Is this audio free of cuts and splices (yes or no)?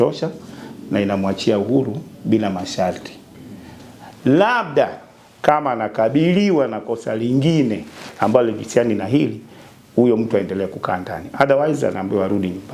yes